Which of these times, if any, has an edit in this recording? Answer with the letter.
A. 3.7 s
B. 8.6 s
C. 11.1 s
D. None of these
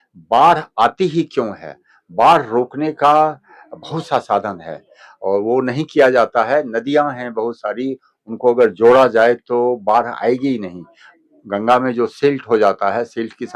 D